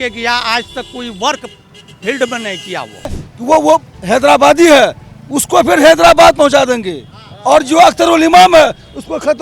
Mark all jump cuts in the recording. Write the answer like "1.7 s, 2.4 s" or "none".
3.3 s